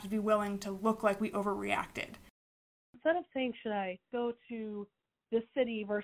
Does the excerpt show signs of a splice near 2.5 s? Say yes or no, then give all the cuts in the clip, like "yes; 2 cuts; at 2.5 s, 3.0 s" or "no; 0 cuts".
yes; 1 cut; at 2.5 s